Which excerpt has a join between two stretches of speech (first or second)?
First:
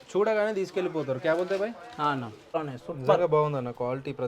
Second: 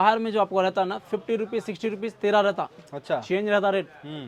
first